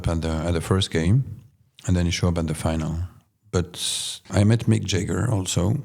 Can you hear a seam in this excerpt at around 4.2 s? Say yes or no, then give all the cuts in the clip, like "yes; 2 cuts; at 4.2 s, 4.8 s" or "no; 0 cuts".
yes; 1 cut; at 4.2 s